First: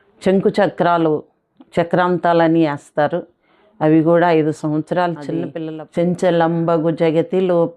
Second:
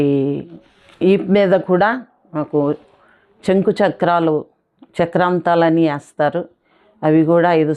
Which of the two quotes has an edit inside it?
first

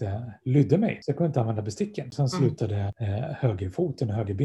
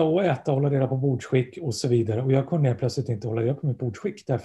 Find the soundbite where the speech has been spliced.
first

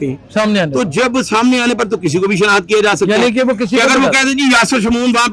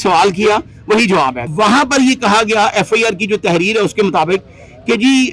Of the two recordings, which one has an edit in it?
second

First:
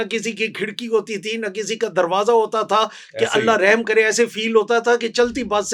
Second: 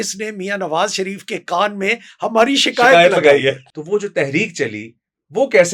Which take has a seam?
second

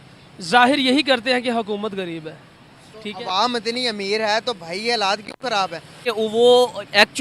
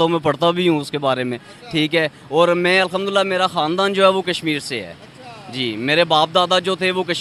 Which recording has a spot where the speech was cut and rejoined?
first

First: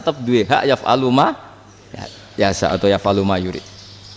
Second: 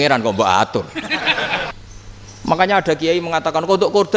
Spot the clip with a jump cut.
second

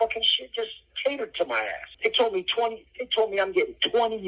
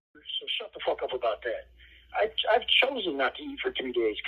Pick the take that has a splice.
first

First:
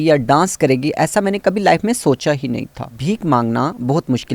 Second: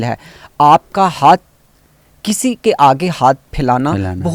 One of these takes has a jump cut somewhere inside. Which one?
first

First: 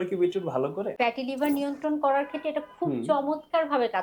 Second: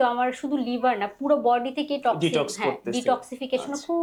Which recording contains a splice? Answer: first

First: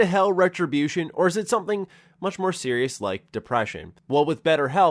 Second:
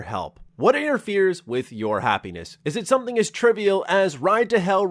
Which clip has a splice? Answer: first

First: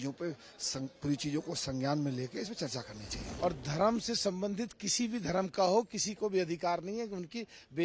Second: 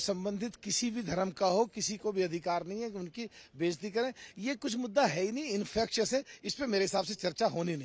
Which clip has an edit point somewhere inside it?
first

